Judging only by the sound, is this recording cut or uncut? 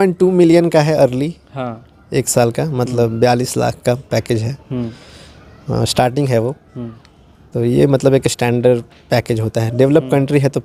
uncut